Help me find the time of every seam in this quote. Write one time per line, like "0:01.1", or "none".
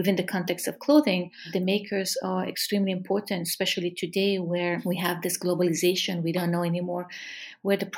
0:01.5
0:04.8